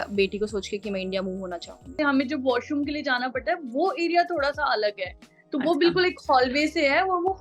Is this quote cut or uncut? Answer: cut